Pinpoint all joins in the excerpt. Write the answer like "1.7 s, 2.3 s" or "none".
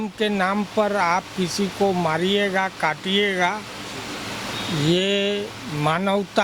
none